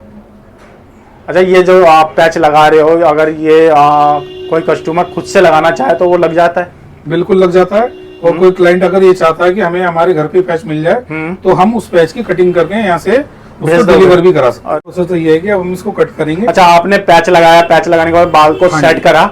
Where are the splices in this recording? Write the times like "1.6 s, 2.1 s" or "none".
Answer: 14.8 s